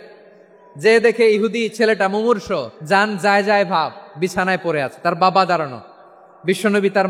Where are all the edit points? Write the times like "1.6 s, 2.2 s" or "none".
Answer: 2.7 s